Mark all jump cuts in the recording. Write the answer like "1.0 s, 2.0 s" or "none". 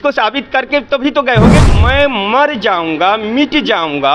1.6 s

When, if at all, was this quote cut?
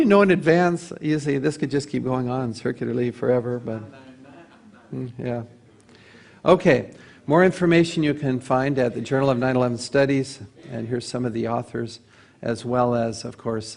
none

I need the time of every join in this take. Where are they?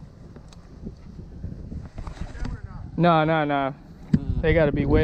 none

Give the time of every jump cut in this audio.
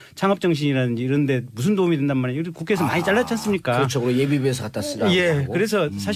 1.1 s

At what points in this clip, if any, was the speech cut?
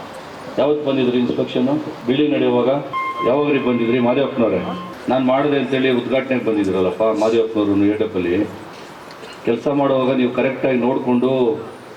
1.9 s, 2.9 s

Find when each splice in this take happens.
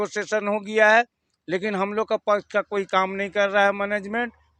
none

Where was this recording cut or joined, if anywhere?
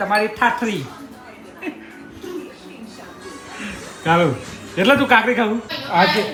none

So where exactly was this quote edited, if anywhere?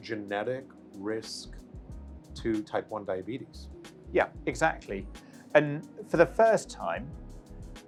none

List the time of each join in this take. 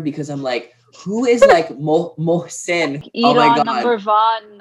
3.1 s

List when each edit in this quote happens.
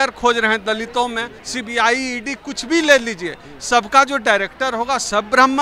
1.3 s

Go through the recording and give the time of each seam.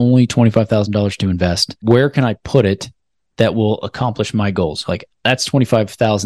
1.7 s

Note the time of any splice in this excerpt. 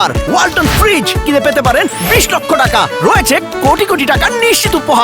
none

